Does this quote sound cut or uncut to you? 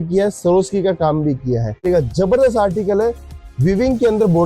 cut